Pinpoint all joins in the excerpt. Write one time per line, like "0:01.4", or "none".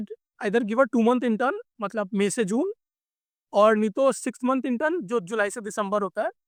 none